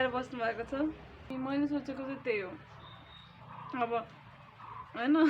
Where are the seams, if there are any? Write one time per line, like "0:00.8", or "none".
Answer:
0:01.3